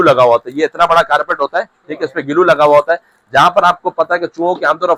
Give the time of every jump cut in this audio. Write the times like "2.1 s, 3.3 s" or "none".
none